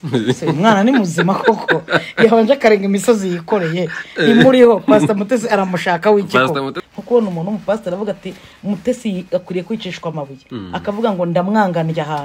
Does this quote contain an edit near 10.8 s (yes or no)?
no